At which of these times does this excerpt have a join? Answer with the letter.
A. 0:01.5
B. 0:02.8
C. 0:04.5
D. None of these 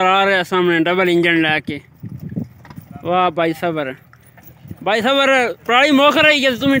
D